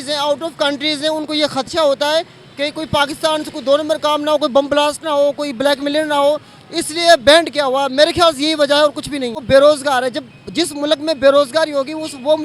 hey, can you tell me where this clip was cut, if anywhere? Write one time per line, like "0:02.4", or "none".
0:09.4